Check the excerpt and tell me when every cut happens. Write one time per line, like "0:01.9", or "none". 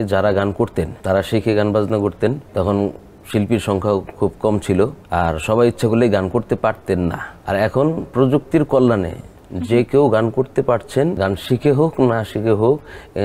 0:01.0
0:02.4
0:05.0
0:07.3
0:11.2